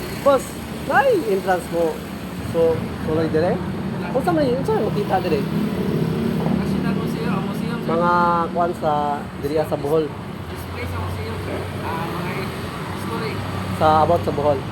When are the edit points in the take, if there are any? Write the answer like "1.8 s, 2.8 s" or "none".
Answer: none